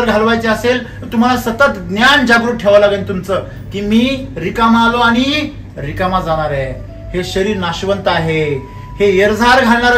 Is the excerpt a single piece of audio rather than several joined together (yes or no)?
yes